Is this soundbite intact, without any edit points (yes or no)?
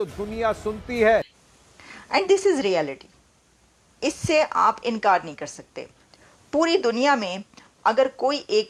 yes